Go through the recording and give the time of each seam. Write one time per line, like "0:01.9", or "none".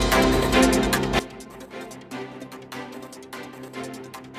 none